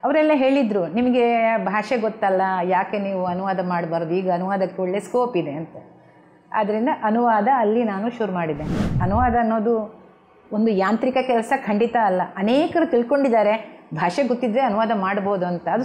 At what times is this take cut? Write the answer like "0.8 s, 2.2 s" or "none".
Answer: 9.0 s